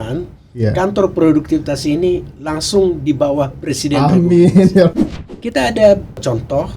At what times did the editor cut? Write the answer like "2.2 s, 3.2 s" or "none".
4.9 s